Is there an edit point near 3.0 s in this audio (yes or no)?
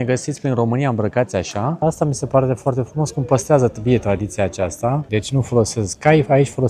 no